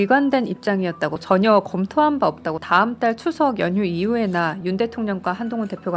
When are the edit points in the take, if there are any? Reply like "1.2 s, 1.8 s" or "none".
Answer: 1.2 s, 2.6 s